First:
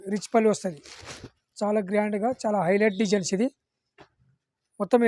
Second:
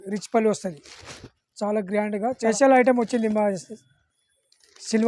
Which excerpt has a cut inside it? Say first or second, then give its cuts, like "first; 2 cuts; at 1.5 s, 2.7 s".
second; 1 cut; at 2.5 s